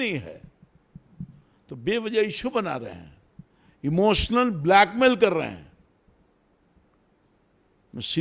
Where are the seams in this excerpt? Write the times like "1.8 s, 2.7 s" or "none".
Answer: none